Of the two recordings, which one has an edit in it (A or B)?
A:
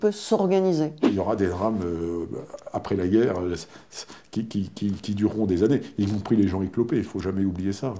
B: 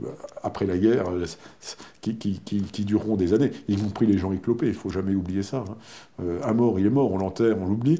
A